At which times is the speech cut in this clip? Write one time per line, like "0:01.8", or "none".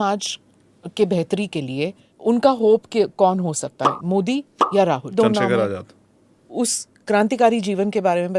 0:02.1
0:05.1
0:06.5

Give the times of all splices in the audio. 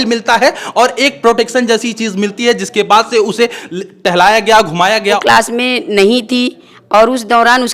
0:05.2

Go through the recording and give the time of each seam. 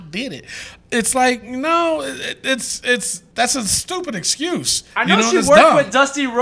0:03.2
0:04.8

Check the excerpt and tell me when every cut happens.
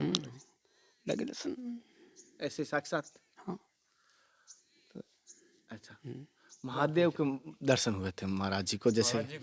none

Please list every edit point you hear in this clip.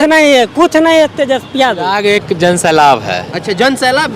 0:01.9

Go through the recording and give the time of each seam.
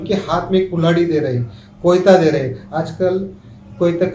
none

